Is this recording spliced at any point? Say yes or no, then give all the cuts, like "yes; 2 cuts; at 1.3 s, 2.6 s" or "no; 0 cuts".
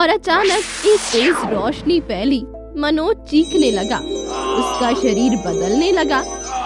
no; 0 cuts